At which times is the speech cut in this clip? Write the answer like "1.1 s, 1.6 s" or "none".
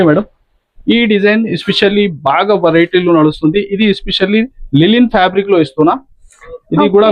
none